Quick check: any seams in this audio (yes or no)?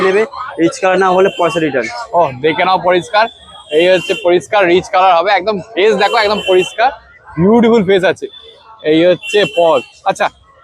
no